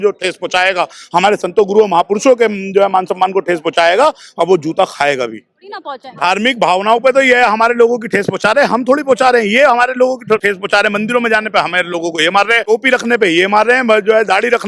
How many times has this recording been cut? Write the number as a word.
three